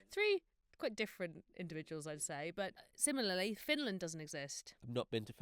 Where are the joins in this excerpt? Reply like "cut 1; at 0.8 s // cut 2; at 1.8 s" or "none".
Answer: cut 1; at 2.9 s

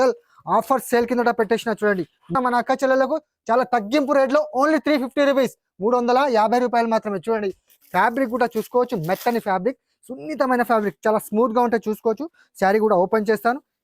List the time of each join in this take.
cut 1; at 2.3 s // cut 2; at 7.7 s

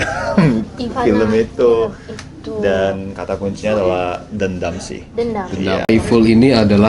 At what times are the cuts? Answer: cut 1; at 5.9 s

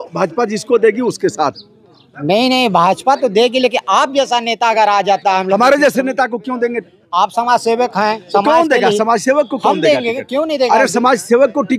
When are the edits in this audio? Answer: none

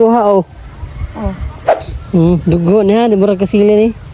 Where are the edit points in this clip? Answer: cut 1; at 1.9 s

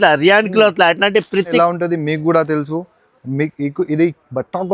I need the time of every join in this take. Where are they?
cut 1; at 1.6 s

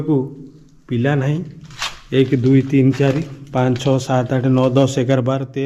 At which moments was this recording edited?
none

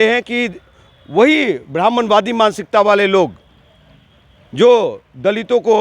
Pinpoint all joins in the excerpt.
none

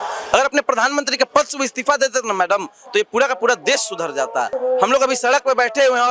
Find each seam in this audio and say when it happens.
cut 1; at 4.5 s

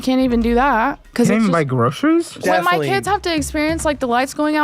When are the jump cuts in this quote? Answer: cut 1; at 2.4 s

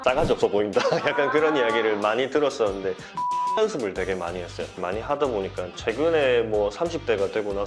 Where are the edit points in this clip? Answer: cut 1; at 4.7 s

